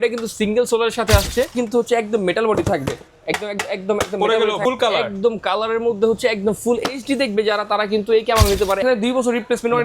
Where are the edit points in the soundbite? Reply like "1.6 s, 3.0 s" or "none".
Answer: 1.5 s, 4.6 s, 8.8 s